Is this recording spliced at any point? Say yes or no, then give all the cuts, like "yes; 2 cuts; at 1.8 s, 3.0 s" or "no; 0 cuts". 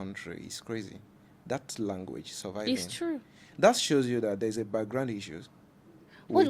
yes; 1 cut; at 3.4 s